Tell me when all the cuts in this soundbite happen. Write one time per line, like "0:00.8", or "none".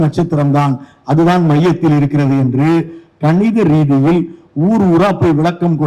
none